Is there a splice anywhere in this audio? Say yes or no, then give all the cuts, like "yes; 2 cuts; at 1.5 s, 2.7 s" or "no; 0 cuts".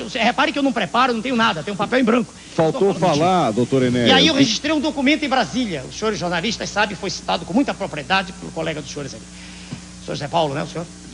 yes; 1 cut; at 4.1 s